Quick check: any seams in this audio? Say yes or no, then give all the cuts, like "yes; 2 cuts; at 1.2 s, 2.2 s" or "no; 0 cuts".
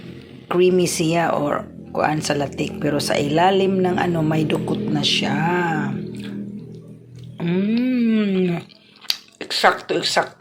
no; 0 cuts